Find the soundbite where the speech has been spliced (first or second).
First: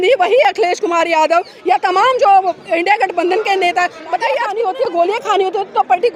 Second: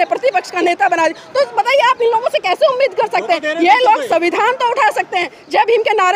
first